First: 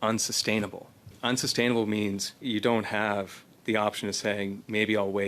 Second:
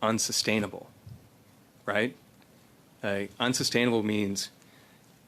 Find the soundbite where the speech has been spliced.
first; 2 cuts; at 1.1 s, 2.4 s

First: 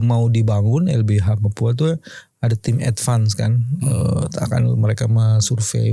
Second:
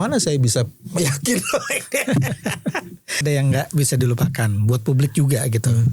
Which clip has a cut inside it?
second; 1 cut; at 3.2 s

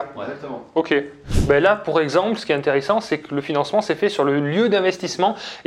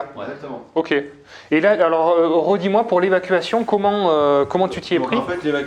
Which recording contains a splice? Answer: first; 1 cut; at 1.3 s

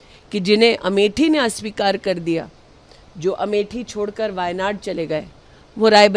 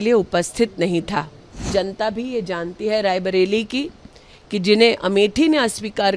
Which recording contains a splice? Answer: second; 1 cut; at 1.7 s

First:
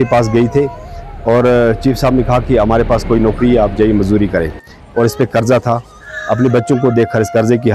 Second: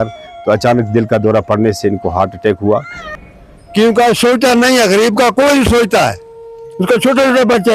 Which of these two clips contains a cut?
second; 1 cut; at 3.0 s

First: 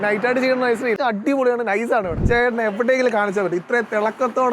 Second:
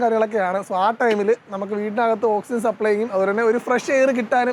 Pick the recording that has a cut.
first; 2 cuts; at 1.0 s, 2.2 s

